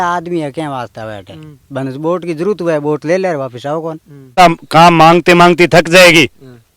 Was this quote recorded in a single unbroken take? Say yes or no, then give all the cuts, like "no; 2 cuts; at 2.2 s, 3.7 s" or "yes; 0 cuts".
no; 1 cut; at 4.3 s